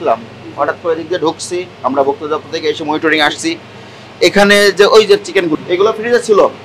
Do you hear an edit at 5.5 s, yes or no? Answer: yes